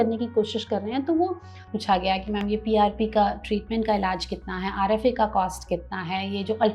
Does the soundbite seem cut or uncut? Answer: cut